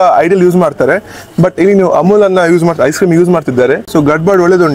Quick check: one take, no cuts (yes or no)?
no